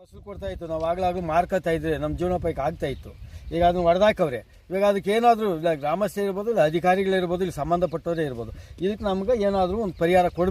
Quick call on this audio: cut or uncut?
uncut